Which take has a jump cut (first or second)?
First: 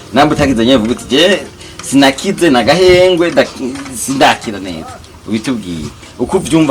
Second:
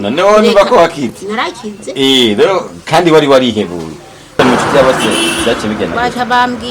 second